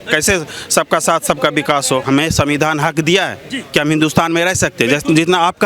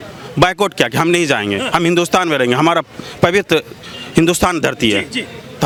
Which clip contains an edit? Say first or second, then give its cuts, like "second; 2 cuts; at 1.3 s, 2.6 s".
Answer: first; 1 cut; at 2.0 s